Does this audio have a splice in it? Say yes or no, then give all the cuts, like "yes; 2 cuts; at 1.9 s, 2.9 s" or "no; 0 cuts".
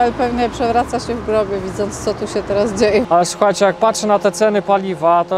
yes; 1 cut; at 3.0 s